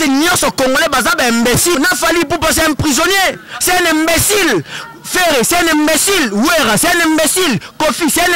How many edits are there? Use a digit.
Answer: 1